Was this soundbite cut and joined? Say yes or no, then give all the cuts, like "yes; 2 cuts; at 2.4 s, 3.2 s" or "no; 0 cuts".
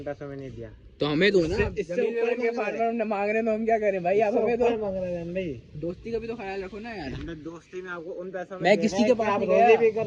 no; 0 cuts